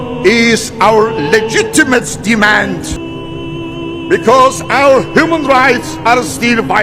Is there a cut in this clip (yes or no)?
yes